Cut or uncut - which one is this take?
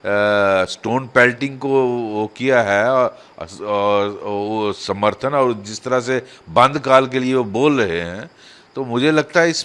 uncut